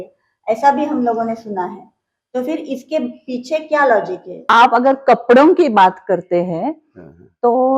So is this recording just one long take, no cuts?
no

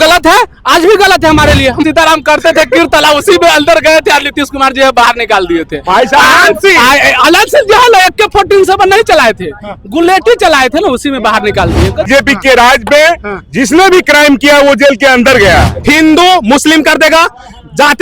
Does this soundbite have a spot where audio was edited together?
yes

